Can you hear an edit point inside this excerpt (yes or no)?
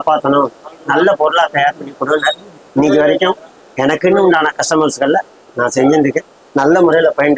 no